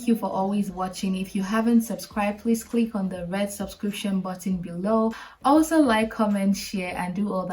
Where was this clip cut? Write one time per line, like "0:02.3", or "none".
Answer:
0:05.3